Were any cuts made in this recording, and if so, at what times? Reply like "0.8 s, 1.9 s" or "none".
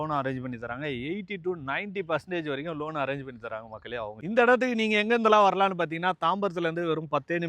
none